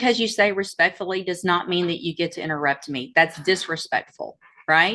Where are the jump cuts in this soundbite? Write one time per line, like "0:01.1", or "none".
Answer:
none